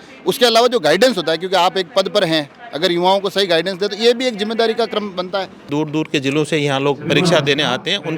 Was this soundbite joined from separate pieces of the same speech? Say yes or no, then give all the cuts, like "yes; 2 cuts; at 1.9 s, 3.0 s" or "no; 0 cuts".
yes; 1 cut; at 5.6 s